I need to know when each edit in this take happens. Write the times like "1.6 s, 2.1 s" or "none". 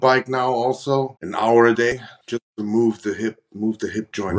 1.2 s, 2.2 s